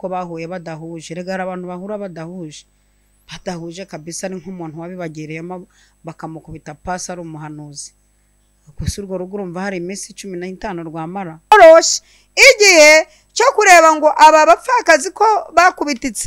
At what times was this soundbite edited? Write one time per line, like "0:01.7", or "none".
0:11.5